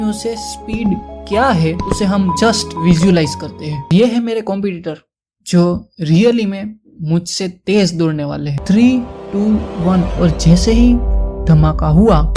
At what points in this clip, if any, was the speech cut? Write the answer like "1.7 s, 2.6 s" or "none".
3.9 s, 8.5 s